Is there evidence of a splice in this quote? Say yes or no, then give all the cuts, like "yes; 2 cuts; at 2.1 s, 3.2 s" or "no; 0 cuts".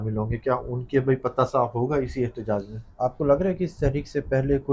yes; 1 cut; at 2.8 s